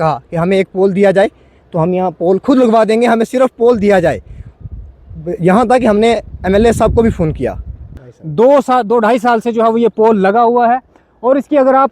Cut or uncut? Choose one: cut